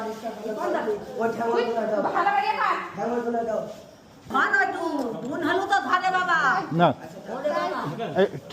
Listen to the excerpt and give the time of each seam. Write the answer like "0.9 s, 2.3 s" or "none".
4.2 s